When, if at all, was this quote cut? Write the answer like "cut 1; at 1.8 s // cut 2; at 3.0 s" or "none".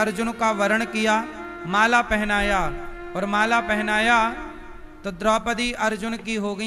none